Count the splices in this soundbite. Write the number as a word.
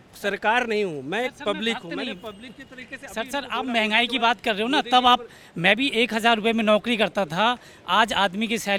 zero